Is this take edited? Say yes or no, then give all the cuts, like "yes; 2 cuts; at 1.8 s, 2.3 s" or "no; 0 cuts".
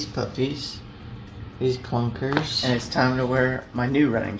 no; 0 cuts